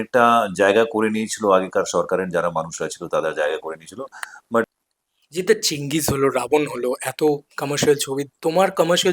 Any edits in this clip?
yes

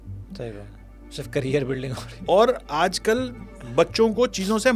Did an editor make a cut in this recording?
no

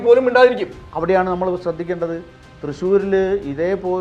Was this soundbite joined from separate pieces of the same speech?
no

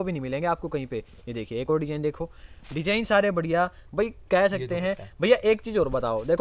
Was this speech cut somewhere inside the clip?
no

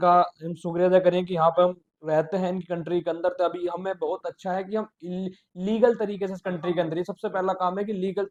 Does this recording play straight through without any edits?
yes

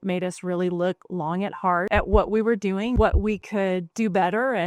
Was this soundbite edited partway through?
yes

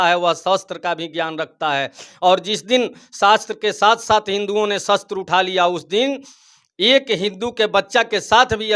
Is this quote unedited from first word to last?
yes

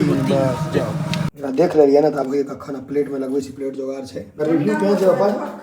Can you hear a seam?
yes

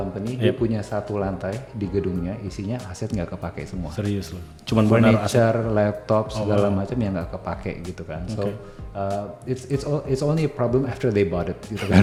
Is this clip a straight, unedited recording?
yes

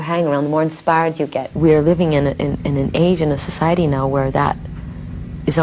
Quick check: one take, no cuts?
no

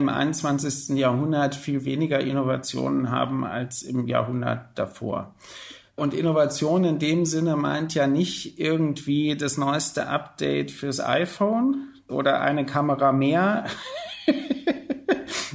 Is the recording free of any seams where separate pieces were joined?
yes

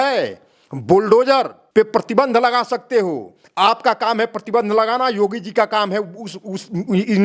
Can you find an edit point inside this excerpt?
yes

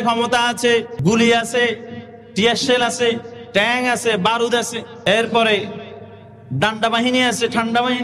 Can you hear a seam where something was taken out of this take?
yes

